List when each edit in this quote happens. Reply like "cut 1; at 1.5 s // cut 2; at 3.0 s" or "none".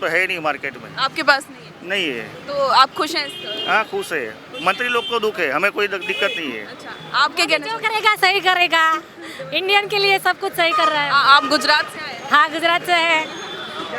none